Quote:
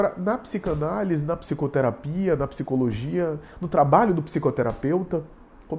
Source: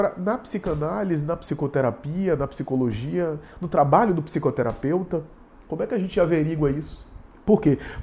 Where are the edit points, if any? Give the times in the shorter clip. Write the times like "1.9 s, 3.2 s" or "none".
none